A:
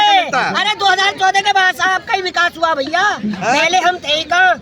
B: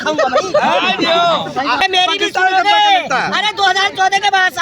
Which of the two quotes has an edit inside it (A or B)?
B